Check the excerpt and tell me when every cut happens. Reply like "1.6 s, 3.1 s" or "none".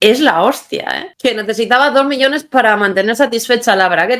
1.1 s

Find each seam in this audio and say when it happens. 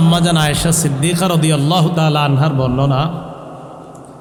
none

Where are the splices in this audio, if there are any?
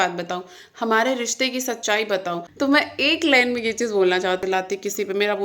2.4 s, 4.4 s

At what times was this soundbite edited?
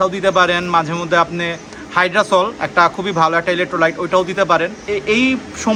none

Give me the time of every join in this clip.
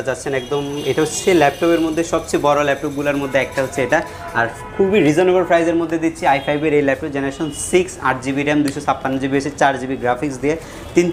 none

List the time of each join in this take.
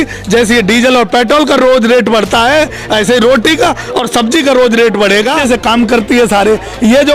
5.4 s

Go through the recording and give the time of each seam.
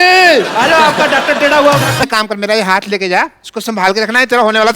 2.0 s

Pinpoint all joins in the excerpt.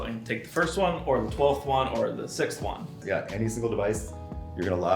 3.0 s

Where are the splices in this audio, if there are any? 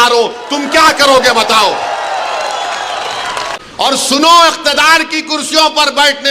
3.5 s

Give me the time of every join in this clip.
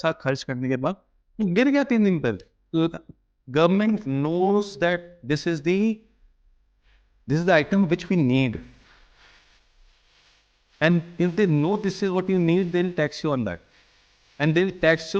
2.5 s

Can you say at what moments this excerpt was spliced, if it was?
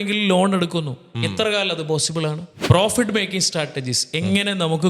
2.5 s

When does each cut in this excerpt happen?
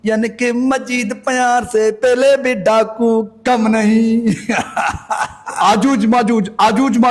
5.5 s

